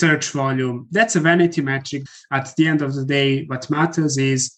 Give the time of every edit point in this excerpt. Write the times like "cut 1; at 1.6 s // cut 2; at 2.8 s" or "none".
cut 1; at 2.2 s

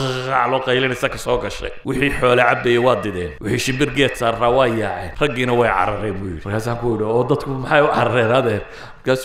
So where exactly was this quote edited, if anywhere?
cut 1; at 1.7 s // cut 2; at 3.3 s // cut 3; at 5.0 s // cut 4; at 6.3 s

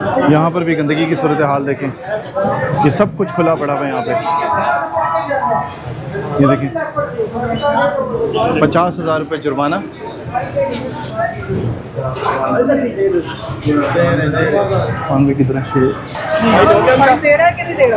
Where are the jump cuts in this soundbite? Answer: none

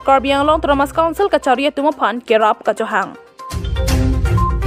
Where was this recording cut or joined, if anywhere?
cut 1; at 3.6 s

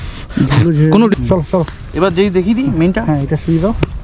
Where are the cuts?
cut 1; at 1.1 s

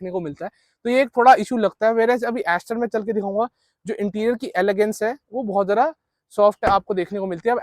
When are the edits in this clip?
none

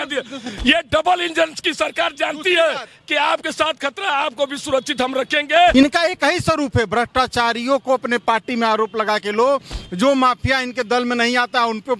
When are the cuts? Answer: cut 1; at 5.7 s

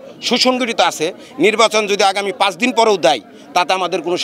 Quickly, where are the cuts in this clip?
none

